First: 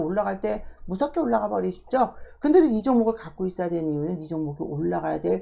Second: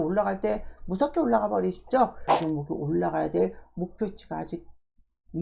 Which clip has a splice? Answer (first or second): second